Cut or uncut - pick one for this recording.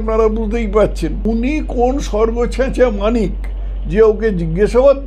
cut